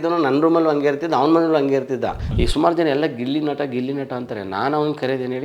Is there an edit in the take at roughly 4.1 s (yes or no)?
no